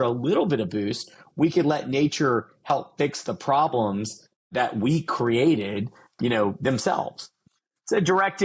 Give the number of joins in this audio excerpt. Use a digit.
3